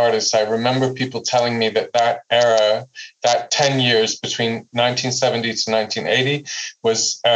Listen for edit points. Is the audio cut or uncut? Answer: cut